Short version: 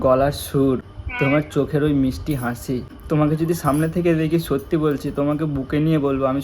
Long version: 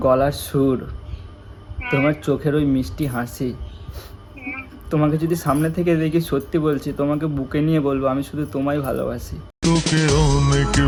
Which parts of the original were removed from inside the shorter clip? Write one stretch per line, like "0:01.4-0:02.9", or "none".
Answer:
0:01.0-0:01.7
0:03.7-0:04.8